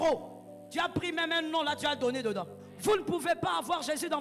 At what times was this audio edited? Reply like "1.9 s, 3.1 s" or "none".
2.6 s